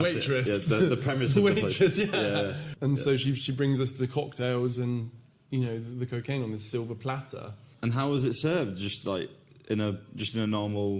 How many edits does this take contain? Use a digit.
2